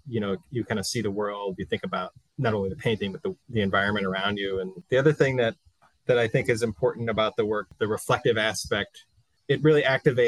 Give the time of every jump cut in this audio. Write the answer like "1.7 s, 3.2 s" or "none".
2.2 s, 3.4 s, 4.8 s, 7.7 s